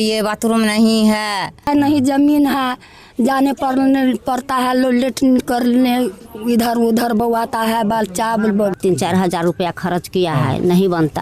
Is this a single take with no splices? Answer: no; 2 cuts; at 1.7 s, 8.8 s

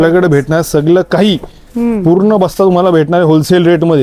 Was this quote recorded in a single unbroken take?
yes; 0 cuts

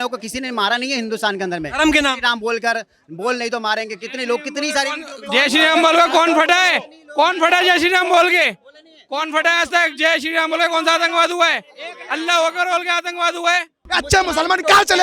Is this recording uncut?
no; 1 cut; at 13.8 s

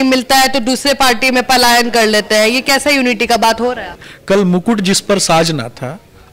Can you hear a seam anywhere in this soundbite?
no; 0 cuts

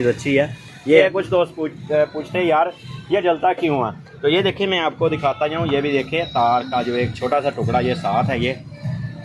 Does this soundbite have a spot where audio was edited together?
yes; 1 cut; at 1.0 s

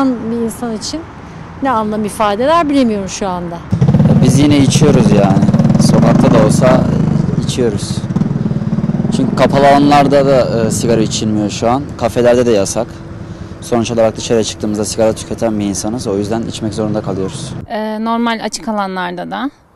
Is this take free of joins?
yes; 0 cuts

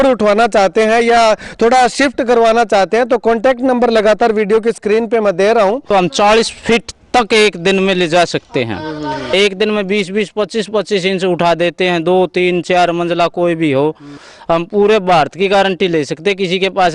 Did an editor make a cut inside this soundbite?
yes; 3 cuts; at 5.9 s, 9.3 s, 14.3 s

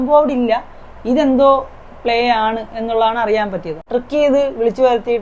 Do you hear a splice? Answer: yes; 1 cut; at 3.8 s

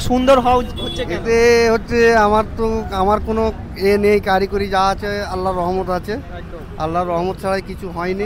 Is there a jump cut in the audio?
no; 0 cuts

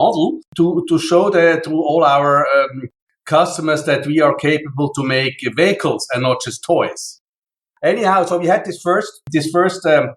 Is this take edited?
yes; 1 cut; at 7.1 s

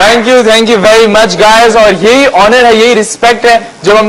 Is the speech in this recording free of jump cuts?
no; 1 cut; at 1.3 s

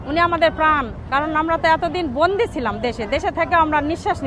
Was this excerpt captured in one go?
no; 1 cut; at 1.0 s

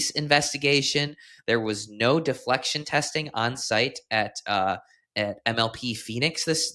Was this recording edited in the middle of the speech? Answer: no; 0 cuts

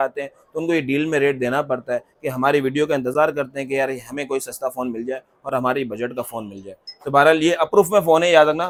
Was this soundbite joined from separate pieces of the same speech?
no; 0 cuts

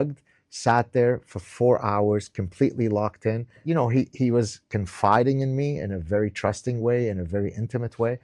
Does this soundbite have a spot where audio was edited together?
yes; 1 cut; at 3.6 s

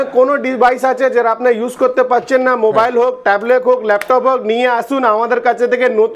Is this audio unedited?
yes; 0 cuts

